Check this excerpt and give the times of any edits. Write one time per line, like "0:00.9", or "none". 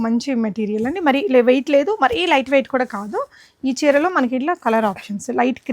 none